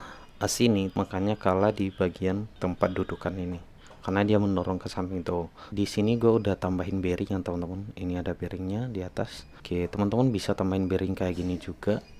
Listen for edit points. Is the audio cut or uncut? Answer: cut